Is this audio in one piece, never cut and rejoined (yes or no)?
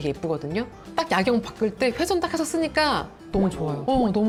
yes